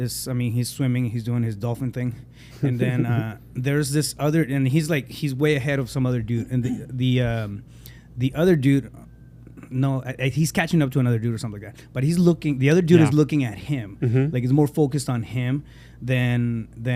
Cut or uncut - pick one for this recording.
uncut